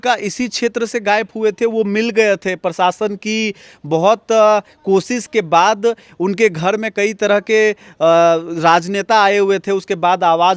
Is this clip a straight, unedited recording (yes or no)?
yes